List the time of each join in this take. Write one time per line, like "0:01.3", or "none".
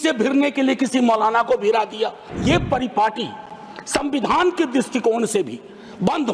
0:02.3